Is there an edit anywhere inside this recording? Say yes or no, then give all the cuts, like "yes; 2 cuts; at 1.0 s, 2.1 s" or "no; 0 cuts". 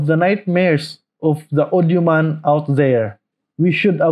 no; 0 cuts